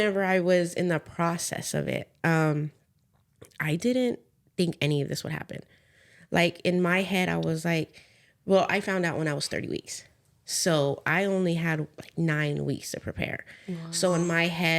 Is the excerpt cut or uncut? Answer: uncut